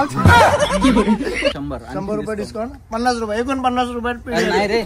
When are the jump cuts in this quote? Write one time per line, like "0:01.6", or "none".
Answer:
0:01.6